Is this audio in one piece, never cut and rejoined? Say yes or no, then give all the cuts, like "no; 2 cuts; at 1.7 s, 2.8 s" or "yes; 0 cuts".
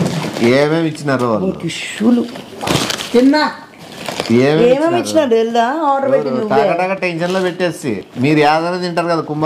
no; 1 cut; at 8.2 s